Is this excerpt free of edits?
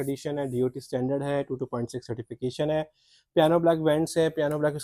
yes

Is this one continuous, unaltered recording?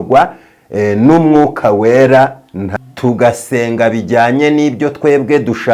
no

